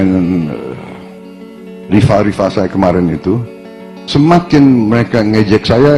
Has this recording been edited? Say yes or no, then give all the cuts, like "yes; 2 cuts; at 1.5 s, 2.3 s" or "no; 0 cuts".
yes; 1 cut; at 1.6 s